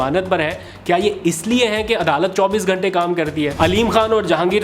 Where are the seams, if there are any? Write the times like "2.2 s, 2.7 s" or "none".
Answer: 3.5 s